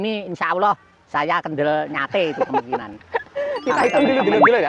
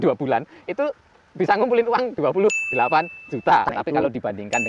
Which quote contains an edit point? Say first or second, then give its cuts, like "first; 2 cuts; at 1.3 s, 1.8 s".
second; 1 cut; at 3.7 s